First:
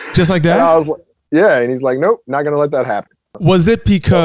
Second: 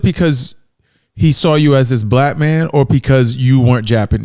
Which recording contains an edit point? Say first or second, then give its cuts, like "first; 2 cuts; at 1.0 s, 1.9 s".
first; 1 cut; at 3.3 s